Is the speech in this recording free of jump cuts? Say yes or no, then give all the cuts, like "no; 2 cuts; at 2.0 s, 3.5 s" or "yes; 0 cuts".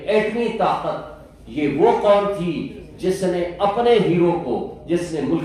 yes; 0 cuts